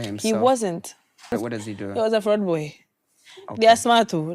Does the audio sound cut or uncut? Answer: cut